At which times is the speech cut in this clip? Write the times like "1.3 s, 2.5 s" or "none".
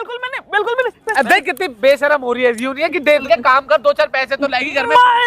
3.2 s

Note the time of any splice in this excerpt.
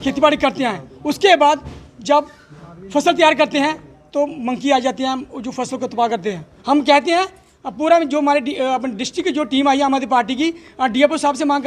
6.5 s

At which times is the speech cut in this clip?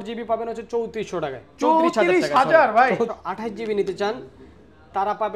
3.1 s

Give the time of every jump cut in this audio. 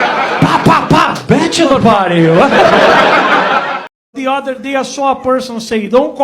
3.9 s

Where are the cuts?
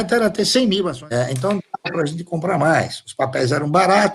1.0 s

